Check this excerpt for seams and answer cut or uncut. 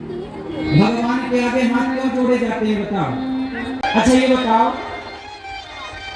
cut